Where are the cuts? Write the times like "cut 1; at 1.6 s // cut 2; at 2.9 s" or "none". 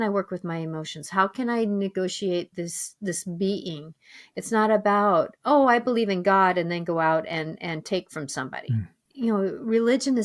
cut 1; at 9.0 s